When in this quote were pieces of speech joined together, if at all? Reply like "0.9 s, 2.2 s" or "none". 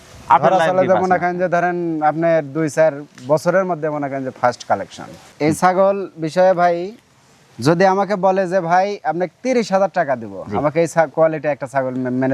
5.3 s